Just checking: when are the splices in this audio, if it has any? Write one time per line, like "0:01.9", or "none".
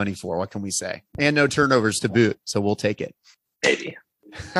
none